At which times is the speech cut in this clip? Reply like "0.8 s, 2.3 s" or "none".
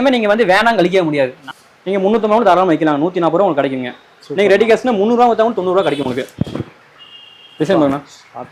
1.4 s, 6.3 s